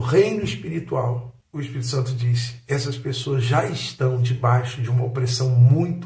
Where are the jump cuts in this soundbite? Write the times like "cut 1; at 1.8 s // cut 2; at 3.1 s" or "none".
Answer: cut 1; at 1.3 s